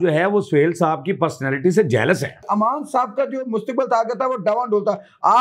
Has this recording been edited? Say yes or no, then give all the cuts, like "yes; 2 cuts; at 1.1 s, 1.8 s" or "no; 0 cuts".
yes; 1 cut; at 2.5 s